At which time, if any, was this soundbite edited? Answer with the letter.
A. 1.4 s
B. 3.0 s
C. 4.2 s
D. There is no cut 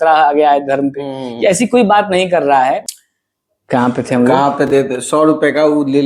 B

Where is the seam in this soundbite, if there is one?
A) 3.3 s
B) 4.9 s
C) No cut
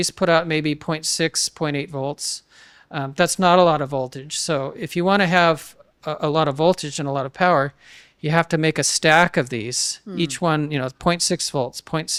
C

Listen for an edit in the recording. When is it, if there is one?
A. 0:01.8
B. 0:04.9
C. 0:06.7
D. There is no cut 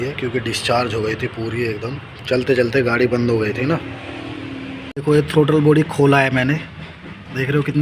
B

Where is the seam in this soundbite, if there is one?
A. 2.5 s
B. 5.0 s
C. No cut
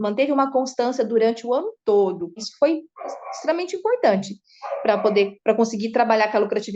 A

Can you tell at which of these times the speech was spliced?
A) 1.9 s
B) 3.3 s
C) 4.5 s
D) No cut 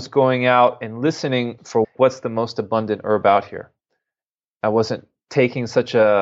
A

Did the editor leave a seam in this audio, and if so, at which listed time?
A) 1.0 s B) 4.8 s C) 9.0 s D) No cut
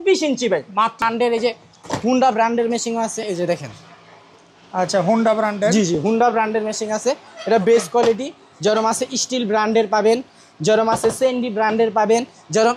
A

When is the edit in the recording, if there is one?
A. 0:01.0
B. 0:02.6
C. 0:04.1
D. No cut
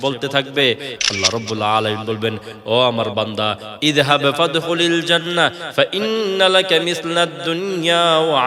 A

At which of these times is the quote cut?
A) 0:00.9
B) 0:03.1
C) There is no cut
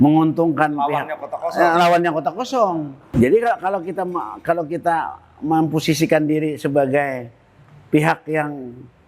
B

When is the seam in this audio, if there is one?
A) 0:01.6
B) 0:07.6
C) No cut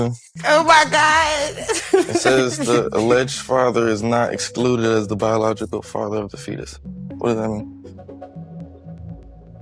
C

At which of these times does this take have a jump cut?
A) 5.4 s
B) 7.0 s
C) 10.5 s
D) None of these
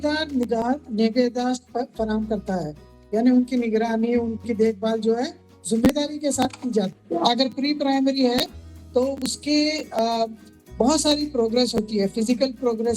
B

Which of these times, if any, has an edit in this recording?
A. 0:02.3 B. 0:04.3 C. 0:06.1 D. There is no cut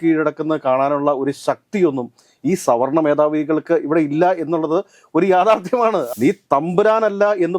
C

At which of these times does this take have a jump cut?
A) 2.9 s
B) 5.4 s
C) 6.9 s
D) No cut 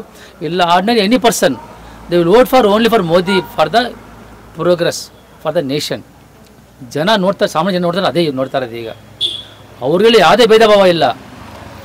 D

